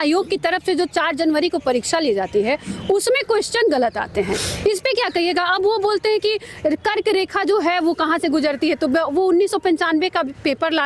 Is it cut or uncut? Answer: uncut